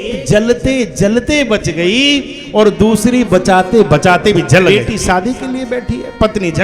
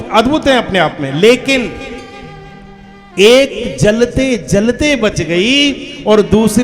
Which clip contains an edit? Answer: first; 1 cut; at 4.7 s

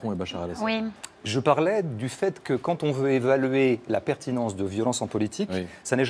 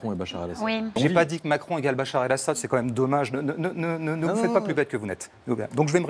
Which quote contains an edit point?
second; 1 cut; at 1.0 s

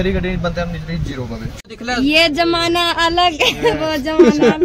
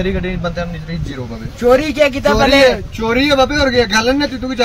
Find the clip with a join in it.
first; 1 cut; at 1.5 s

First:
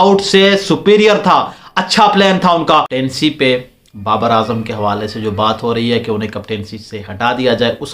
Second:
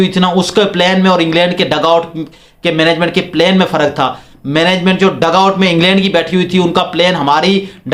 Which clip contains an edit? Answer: first; 1 cut; at 2.7 s

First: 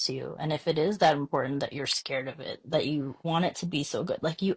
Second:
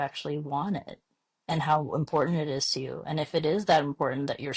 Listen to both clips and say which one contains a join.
first; 1 cut; at 3.2 s

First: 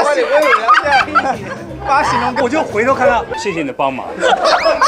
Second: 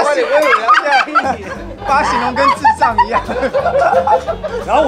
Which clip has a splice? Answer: first; 1 cut; at 2.4 s

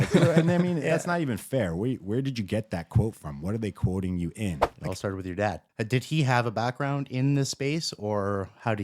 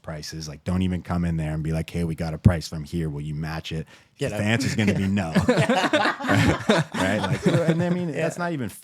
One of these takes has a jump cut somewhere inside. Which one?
first; 2 cuts; at 4.7 s, 5.6 s

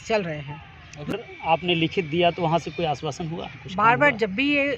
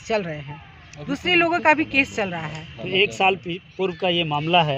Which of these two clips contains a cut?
first; 1 cut; at 1.1 s

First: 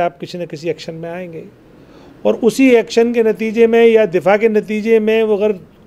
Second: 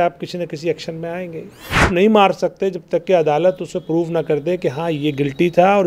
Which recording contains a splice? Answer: second; 1 cut; at 1.9 s

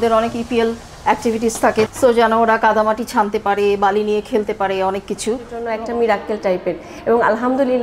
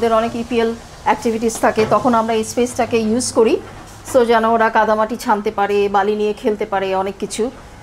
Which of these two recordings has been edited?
first; 2 cuts; at 1.9 s, 5.6 s

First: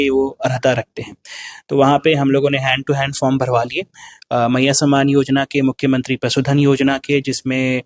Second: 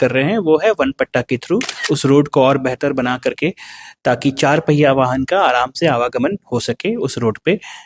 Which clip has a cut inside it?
second; 1 cut; at 1.8 s

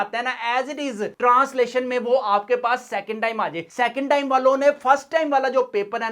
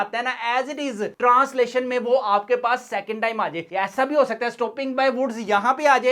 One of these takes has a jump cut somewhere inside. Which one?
second; 1 cut; at 3.6 s

